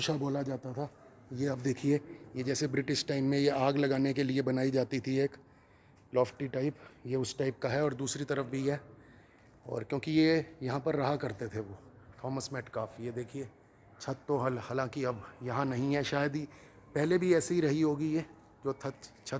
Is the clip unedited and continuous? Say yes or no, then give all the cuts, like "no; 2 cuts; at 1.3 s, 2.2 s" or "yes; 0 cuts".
yes; 0 cuts